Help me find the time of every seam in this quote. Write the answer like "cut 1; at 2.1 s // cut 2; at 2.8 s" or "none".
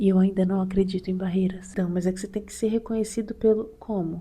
cut 1; at 1.7 s